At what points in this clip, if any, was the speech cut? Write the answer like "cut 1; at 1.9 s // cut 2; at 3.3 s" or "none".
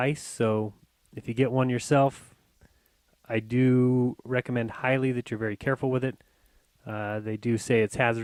none